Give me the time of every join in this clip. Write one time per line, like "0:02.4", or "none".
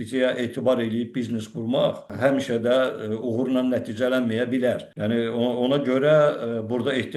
0:02.1
0:04.9